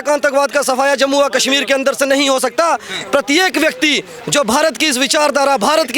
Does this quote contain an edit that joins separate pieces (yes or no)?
no